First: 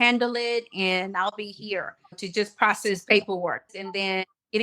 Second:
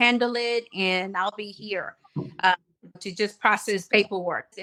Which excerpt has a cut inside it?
first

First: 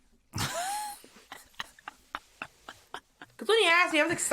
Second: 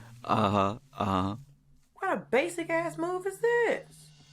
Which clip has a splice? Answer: first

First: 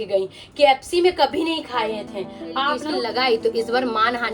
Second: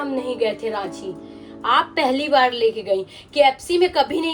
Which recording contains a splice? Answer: first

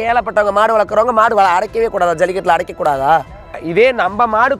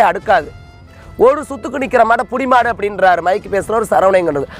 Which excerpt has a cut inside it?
first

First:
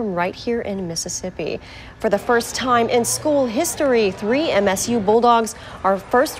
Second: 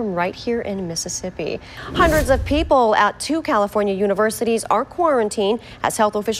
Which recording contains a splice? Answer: second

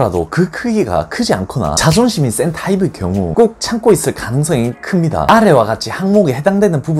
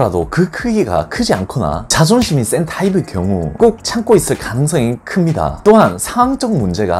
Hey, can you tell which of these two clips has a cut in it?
first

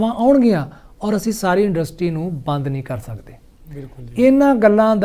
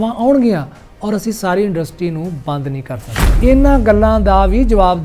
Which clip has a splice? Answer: second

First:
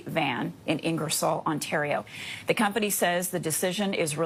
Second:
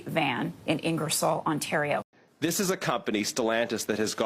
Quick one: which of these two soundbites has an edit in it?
second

